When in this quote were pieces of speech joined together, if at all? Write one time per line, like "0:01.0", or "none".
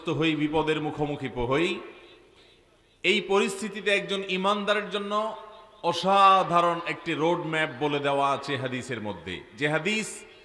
none